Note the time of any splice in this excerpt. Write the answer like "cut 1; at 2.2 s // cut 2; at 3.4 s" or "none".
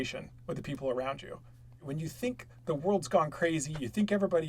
cut 1; at 1.8 s